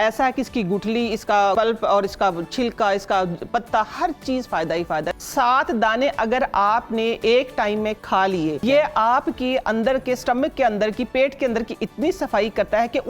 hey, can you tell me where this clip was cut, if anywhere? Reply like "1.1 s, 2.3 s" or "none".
1.5 s, 5.1 s, 8.6 s